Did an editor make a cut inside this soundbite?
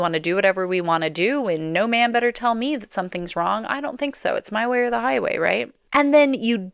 yes; 1 cut; at 5.8 s

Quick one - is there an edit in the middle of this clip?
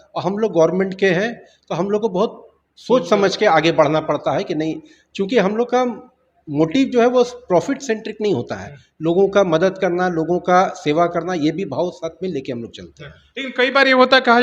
no; 0 cuts

